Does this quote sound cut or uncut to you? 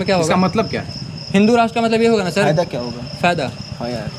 uncut